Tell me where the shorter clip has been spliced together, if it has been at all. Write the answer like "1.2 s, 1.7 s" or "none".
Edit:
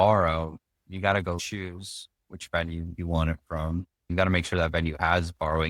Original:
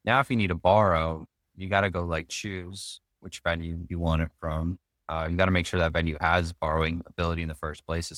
1.4 s, 4.1 s

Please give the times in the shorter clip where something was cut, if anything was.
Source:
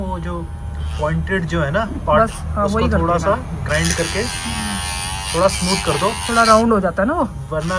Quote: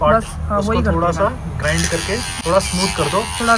2.3 s

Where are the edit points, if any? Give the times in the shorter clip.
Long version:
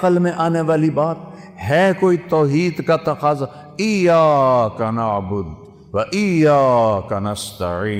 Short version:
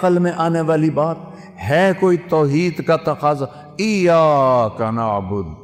none

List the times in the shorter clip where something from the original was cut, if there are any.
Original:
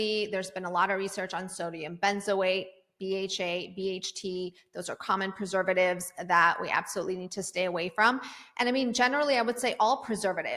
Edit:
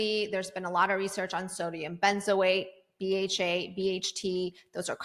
none

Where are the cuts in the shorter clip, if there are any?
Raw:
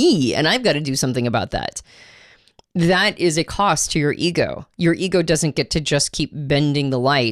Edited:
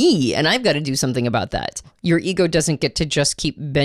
1.9 s

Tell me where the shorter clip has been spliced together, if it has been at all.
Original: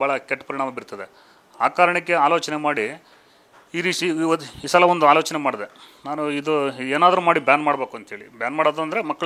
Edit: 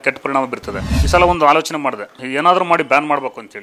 0.9 s, 2.2 s

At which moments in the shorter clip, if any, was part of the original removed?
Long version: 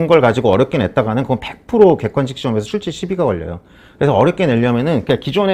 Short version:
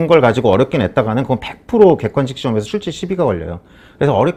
none

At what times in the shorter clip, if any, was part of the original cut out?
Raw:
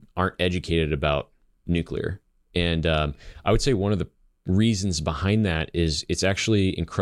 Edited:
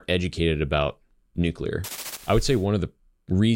2.1 s

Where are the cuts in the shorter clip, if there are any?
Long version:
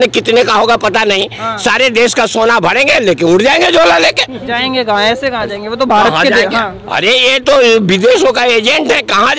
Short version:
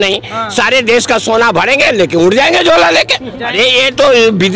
3.4 s

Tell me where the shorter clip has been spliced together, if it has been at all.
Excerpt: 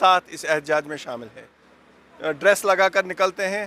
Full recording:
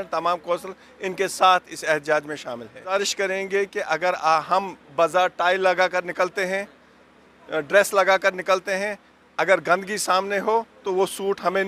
1.4 s

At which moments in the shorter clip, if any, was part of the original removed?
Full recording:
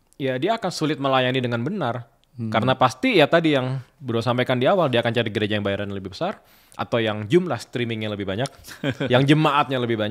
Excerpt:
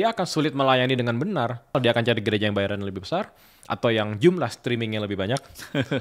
1.7 s

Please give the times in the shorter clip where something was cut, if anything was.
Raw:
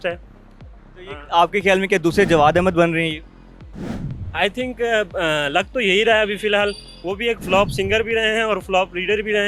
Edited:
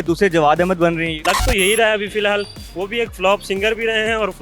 1.2 s

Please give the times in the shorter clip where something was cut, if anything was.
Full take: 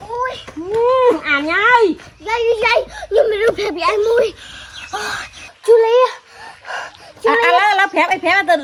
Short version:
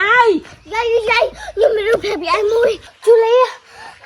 2.9 s

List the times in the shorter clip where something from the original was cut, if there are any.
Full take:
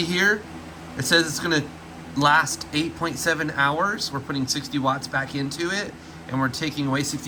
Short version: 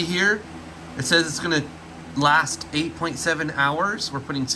none

